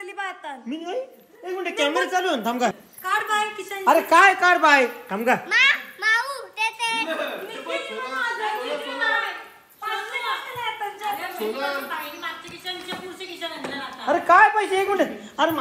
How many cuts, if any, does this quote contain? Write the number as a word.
one